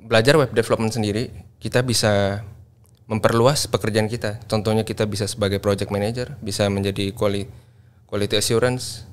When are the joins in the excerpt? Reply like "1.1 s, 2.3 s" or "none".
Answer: none